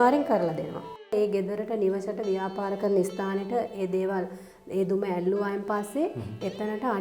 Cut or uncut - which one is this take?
cut